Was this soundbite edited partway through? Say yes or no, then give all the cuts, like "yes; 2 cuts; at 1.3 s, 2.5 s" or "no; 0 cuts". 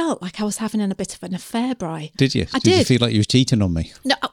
no; 0 cuts